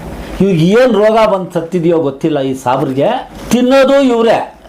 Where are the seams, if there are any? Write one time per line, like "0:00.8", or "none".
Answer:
0:03.3